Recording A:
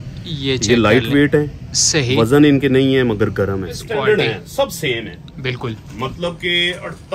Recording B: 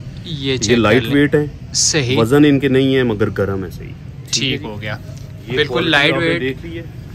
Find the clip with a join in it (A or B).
A